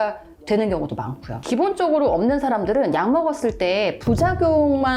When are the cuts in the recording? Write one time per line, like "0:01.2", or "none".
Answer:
0:01.4